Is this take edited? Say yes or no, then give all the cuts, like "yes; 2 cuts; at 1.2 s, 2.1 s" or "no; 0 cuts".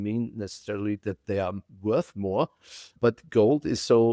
yes; 1 cut; at 2.9 s